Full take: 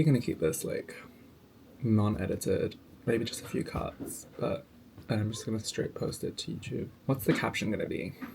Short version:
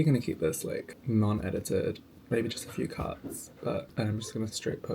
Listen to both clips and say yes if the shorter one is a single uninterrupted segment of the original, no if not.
no